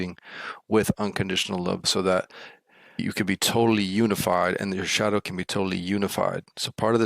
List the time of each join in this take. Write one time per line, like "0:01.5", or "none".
0:01.8